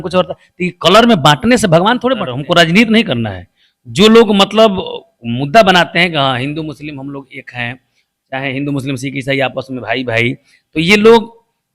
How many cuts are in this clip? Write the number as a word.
one